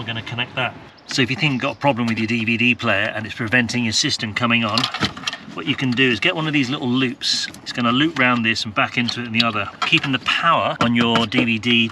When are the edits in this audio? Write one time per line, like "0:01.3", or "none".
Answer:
0:01.0
0:07.6
0:09.8
0:10.8